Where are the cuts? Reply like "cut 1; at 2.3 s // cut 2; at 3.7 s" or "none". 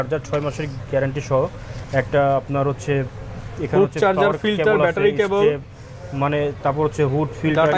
none